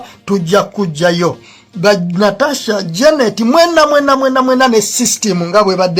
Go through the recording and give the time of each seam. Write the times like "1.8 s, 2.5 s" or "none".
none